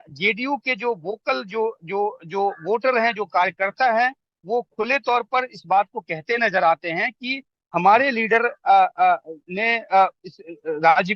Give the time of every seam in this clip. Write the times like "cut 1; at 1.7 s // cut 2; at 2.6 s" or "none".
none